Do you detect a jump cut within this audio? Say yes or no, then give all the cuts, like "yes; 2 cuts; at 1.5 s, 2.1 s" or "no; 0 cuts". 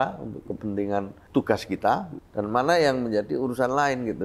yes; 2 cuts; at 1.2 s, 2.2 s